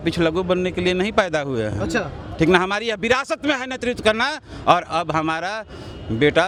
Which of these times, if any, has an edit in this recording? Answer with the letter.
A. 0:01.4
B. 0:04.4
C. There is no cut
C